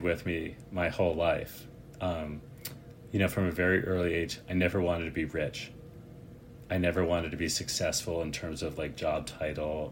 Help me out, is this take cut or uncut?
uncut